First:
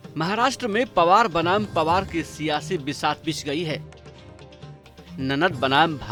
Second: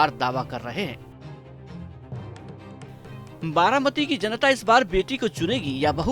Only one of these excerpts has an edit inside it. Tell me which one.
second; 2 cuts; at 1.0 s, 3.4 s

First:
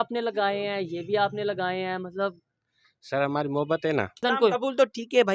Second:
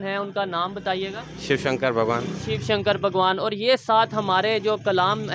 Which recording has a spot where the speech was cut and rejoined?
first; 1 cut; at 4.2 s

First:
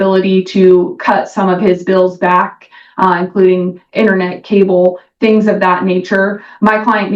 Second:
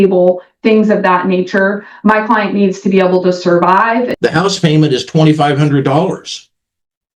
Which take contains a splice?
second; 1 cut; at 4.1 s

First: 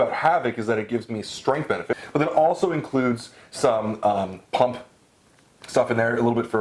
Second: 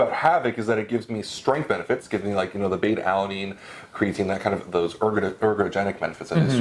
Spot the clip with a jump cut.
first; 1 cut; at 2.0 s

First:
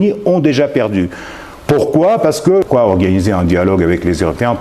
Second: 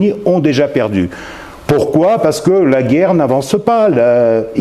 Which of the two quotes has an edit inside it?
first; 1 cut; at 2.6 s

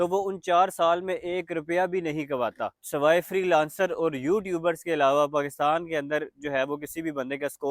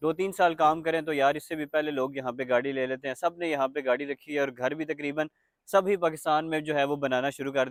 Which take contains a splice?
first; 1 cut; at 2.8 s

